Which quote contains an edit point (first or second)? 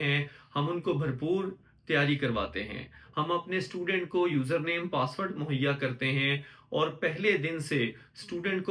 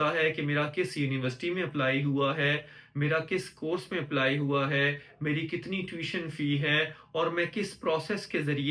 first